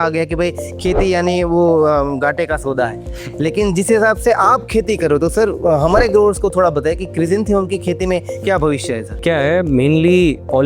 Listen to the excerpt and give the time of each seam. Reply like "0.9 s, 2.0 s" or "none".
9.2 s